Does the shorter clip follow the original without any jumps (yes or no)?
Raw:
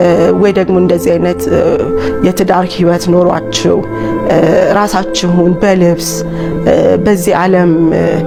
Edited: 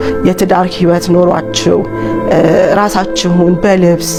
yes